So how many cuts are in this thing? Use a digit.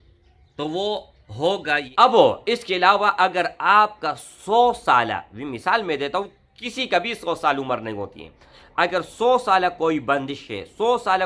1